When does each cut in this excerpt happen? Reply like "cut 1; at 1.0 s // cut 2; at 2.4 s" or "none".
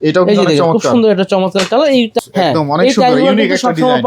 cut 1; at 2.1 s